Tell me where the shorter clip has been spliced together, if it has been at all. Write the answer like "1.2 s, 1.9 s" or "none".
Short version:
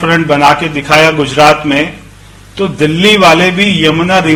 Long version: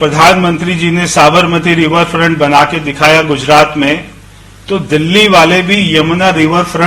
none